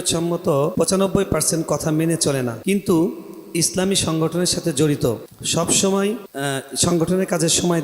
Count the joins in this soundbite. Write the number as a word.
four